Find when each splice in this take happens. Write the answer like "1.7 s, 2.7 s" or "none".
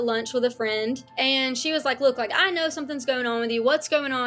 1.1 s